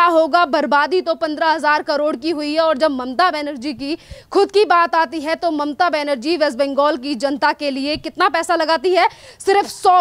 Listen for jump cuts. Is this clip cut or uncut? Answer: uncut